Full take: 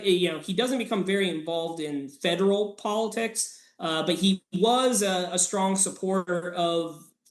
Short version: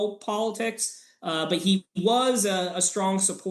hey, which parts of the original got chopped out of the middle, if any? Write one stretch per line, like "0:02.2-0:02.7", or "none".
none